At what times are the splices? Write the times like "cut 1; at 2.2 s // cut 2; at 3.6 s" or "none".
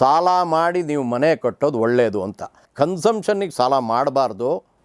cut 1; at 2.7 s